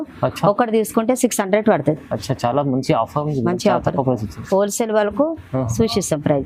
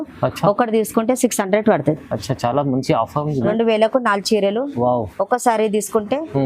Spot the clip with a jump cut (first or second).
second